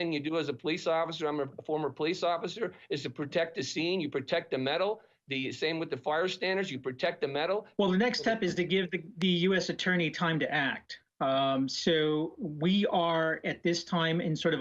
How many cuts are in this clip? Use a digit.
1